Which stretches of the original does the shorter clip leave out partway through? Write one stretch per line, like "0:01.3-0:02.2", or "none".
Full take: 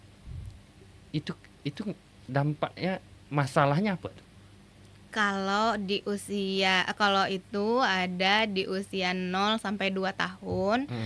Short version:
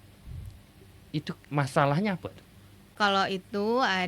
0:01.4-0:03.2
0:04.7-0:06.9